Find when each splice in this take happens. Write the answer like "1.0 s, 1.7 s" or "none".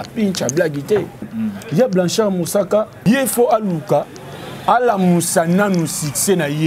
1.3 s, 2.9 s